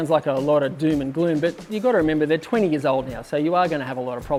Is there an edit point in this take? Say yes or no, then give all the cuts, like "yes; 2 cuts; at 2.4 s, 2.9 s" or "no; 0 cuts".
no; 0 cuts